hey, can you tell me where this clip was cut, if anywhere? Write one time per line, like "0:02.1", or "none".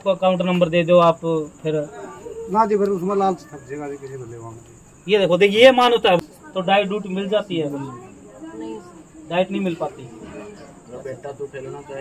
0:06.2